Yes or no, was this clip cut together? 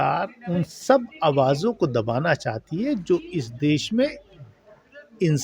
no